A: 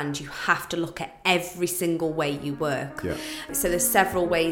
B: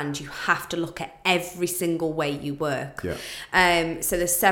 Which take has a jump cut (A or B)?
A